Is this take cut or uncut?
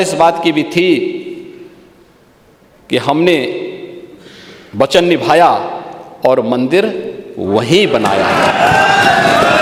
uncut